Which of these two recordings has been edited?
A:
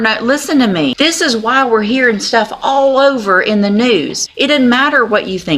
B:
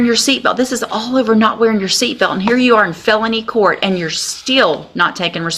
A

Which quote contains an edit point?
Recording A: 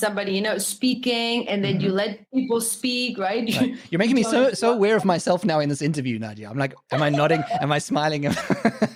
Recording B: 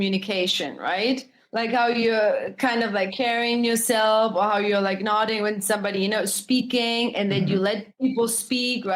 B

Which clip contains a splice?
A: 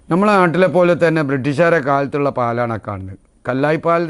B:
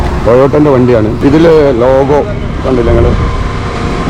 B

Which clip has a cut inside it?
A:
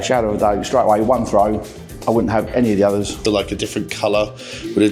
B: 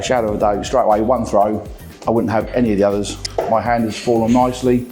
A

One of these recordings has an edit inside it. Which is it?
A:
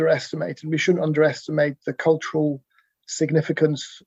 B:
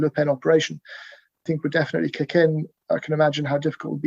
B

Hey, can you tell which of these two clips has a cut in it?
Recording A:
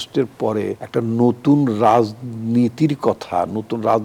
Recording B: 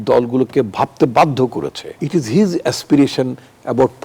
B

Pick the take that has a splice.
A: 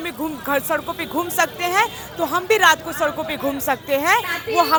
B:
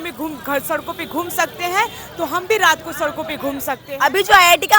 B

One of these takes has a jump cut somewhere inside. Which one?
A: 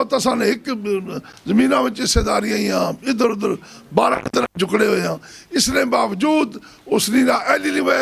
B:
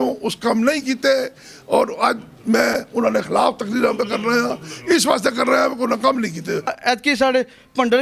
B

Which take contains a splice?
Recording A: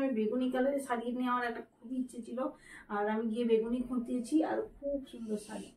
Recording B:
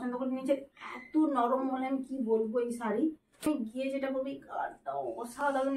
B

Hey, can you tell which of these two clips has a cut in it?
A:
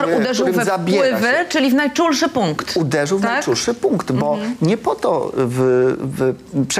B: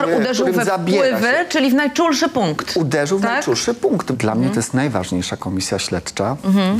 B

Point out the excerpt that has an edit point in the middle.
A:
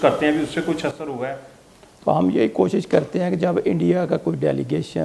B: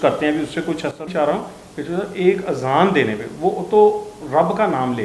B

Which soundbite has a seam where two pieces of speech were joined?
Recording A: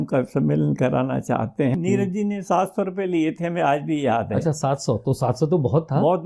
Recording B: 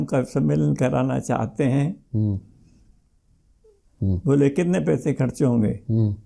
A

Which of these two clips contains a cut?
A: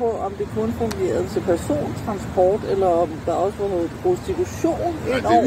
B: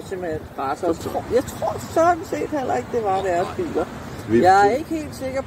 B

